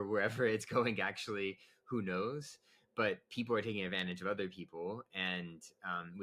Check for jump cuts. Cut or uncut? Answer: uncut